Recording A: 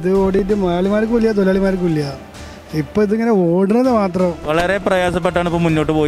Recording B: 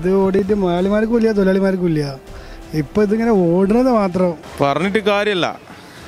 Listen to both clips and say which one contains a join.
A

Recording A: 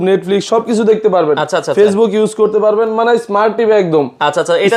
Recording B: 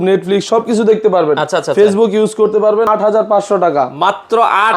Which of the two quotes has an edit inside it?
B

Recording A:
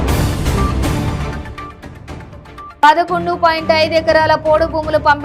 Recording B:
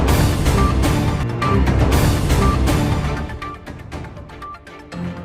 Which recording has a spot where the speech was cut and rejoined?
A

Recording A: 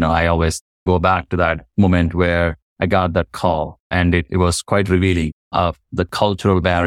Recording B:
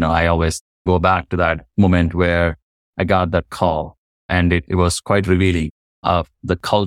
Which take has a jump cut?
A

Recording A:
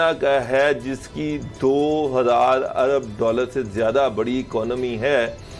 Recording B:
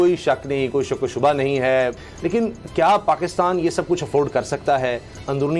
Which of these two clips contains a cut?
B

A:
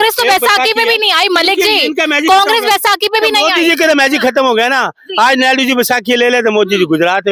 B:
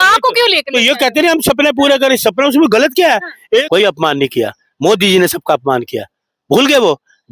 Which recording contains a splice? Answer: B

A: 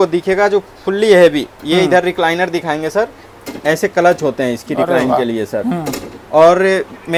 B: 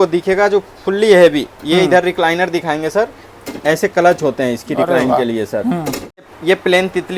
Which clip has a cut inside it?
B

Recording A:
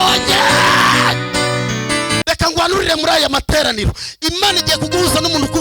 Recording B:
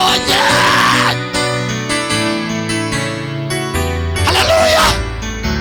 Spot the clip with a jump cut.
A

